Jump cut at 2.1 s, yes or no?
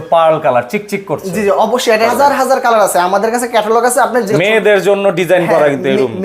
yes